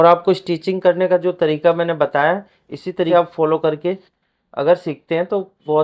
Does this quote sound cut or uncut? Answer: cut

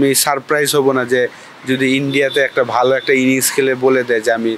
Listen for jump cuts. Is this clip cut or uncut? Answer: uncut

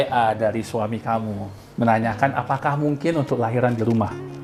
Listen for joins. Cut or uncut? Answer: uncut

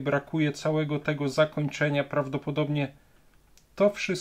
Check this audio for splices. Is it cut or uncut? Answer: uncut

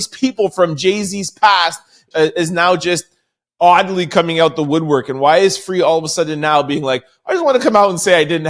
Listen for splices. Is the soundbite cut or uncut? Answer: cut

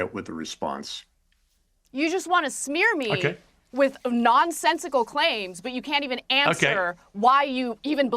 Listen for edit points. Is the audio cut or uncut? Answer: cut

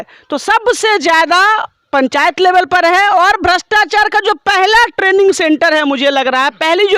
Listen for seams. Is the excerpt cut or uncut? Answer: uncut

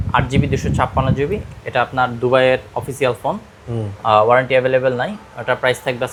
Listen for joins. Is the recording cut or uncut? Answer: uncut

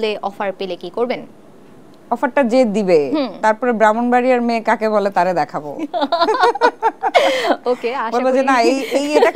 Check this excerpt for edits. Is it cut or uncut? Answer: uncut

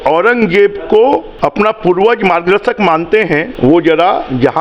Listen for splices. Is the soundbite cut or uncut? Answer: cut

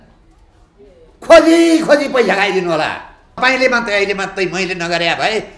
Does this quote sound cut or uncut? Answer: cut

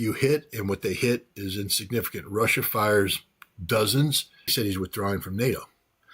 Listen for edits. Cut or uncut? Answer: cut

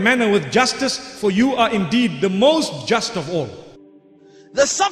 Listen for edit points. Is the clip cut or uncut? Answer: cut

